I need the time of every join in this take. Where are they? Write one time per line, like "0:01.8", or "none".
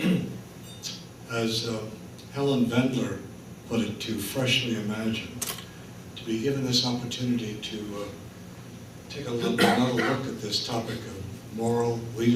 0:09.6